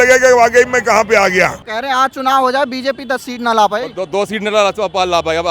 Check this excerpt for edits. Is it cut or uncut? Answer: cut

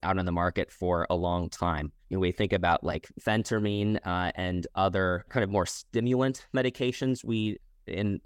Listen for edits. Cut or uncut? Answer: uncut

